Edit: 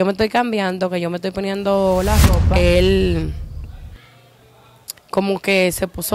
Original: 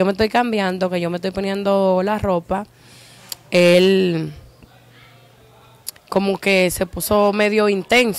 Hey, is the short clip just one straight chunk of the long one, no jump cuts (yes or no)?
no